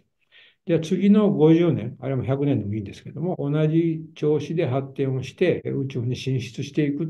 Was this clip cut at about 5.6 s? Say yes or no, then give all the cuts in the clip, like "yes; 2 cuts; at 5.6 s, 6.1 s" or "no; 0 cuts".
yes; 1 cut; at 5.6 s